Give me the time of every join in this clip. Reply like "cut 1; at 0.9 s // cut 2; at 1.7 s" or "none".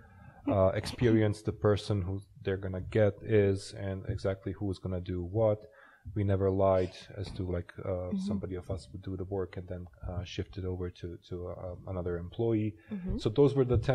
none